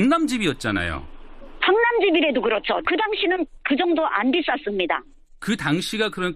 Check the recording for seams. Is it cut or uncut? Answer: cut